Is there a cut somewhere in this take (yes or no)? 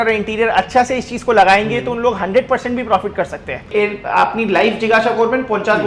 yes